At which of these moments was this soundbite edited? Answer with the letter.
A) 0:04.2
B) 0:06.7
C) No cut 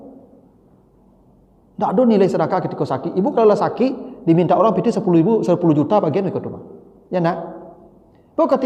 C